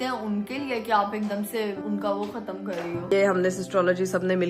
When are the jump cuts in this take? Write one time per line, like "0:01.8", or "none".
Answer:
0:01.8
0:03.1